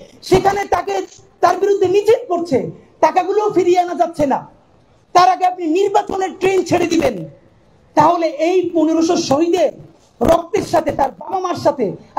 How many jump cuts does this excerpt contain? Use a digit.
1